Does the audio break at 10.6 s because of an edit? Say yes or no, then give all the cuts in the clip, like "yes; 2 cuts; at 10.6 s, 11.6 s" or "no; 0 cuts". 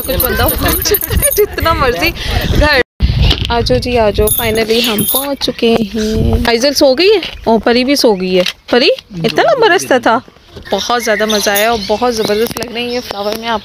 yes; 3 cuts; at 2.8 s, 6.4 s, 10.6 s